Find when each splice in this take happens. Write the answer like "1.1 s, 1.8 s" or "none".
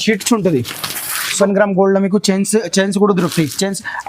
1.4 s